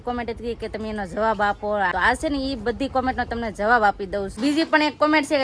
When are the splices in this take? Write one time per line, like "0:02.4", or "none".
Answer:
0:01.9
0:04.3

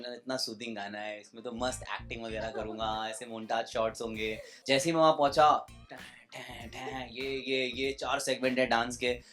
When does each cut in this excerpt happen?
0:04.5

